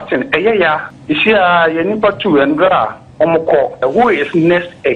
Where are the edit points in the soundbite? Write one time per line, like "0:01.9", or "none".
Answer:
0:00.9
0:03.8